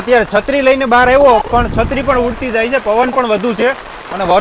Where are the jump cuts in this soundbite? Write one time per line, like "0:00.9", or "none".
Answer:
none

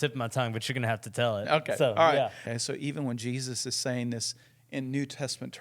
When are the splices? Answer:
0:02.4

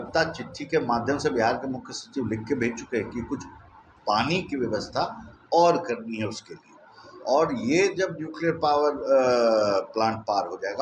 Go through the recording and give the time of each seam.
none

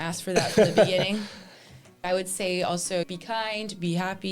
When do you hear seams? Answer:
0:02.0
0:03.1

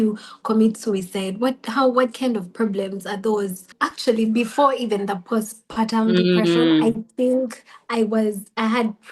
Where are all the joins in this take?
0:03.7

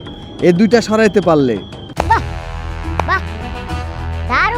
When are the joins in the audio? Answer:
0:01.8

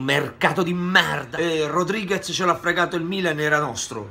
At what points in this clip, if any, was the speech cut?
0:01.2

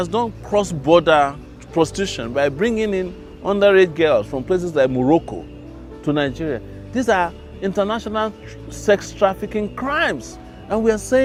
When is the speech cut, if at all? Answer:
none

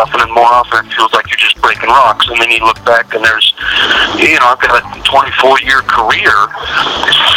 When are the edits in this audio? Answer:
none

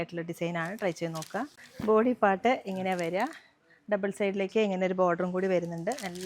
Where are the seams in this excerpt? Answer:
0:01.6

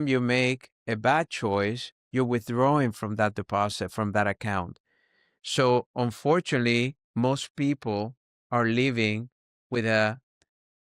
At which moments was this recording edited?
none

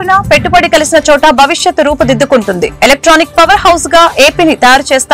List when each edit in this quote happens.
none

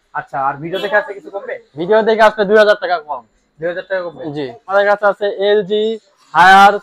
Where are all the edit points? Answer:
0:04.7

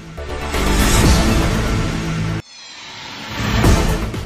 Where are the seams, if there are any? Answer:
none

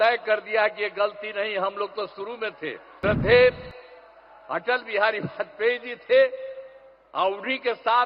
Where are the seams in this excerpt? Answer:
0:02.9

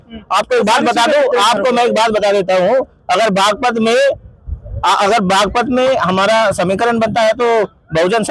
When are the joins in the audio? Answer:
none

